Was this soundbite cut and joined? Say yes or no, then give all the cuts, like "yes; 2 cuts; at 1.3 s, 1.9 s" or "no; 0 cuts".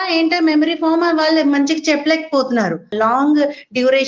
yes; 1 cut; at 2.9 s